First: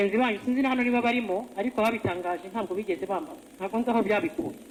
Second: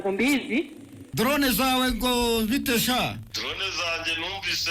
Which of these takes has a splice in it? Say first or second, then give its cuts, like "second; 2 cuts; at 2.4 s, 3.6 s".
second; 2 cuts; at 1.0 s, 3.3 s